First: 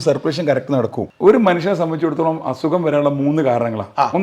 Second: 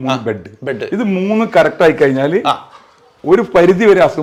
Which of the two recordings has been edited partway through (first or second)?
first